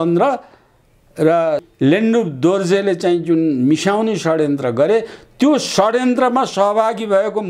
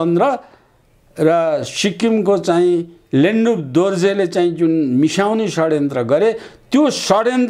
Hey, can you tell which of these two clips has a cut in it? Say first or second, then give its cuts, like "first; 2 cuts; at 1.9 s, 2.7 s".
first; 1 cut; at 1.7 s